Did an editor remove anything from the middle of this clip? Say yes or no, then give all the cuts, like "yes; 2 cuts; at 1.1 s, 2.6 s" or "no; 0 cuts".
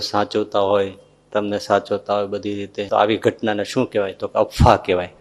yes; 1 cut; at 2.9 s